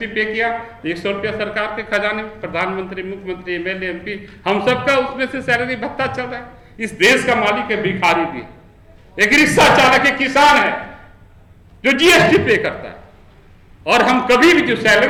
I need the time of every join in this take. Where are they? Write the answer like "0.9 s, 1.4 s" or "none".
none